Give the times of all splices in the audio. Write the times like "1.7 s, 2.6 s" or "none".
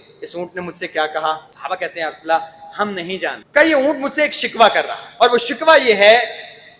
1.5 s, 3.4 s, 5.0 s